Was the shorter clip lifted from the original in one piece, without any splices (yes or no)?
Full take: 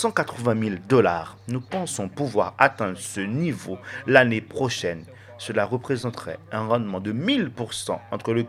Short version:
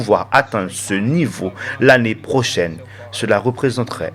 yes